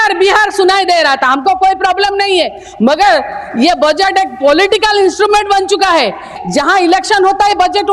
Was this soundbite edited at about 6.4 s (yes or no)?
yes